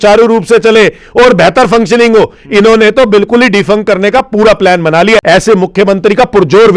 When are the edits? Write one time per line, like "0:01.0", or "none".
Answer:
0:05.2